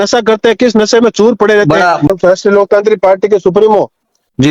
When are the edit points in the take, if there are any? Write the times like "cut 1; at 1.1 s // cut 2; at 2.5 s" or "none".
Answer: cut 1; at 2.1 s